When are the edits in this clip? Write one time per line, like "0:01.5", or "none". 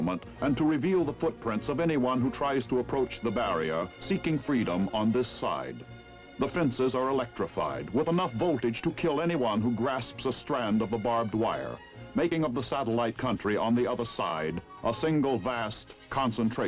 0:12.1